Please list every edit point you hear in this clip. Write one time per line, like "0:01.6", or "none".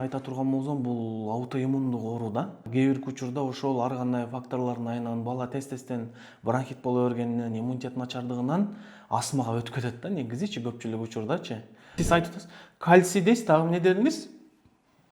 0:02.6
0:11.9

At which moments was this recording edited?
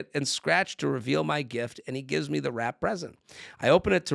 none

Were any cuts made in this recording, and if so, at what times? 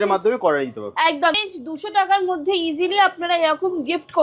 0:01.4

